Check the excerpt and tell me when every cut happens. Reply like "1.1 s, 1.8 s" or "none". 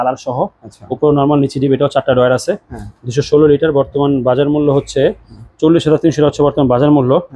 none